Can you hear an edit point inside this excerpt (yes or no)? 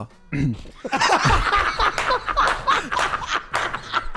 no